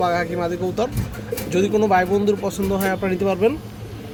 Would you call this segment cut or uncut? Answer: uncut